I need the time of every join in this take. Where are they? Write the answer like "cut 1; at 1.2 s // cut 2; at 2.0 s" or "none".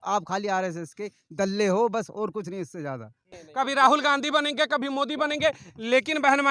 cut 1; at 3.4 s